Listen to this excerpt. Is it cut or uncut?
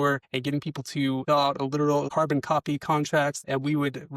cut